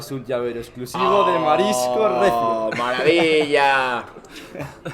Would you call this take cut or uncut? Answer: uncut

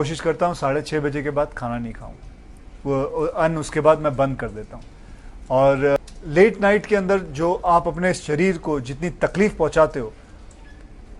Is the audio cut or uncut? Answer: uncut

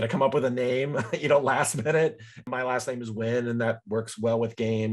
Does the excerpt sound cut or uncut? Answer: cut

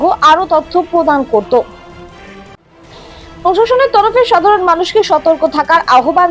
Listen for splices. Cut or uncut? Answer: cut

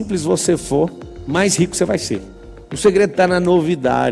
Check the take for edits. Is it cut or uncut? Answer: cut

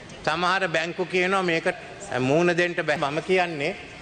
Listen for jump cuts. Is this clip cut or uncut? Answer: uncut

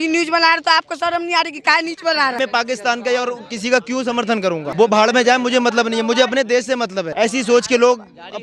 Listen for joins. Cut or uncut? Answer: cut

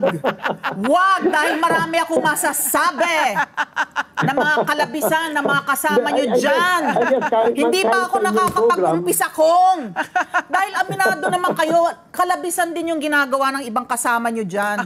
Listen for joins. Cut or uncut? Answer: uncut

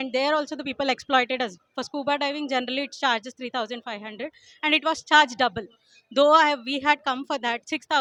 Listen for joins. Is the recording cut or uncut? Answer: uncut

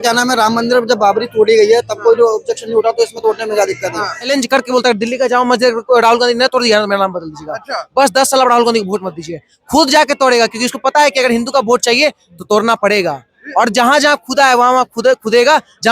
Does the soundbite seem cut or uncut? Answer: cut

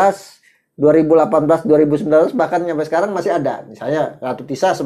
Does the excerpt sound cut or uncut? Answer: uncut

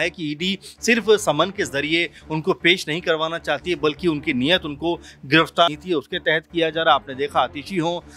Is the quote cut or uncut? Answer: cut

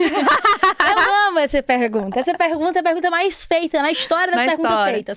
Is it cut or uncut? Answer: uncut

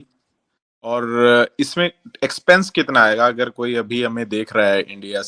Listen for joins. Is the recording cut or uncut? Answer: cut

